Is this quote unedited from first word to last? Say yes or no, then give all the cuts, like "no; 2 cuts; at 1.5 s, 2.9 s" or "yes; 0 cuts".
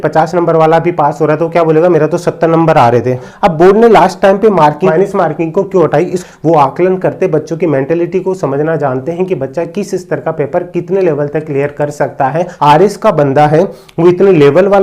no; 4 cuts; at 3.2 s, 4.9 s, 6.2 s, 12.5 s